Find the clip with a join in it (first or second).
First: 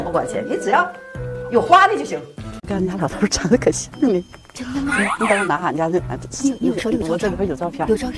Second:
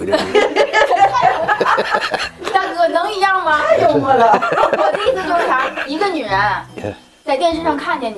first